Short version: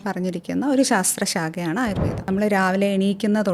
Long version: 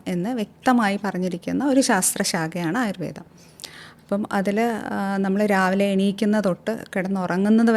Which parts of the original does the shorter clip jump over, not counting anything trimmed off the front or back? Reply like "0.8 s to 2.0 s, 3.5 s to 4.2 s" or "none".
3.3 s to 5.3 s